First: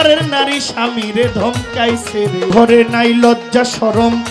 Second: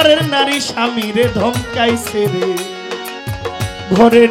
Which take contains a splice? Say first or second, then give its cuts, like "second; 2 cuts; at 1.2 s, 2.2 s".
first; 1 cut; at 2.5 s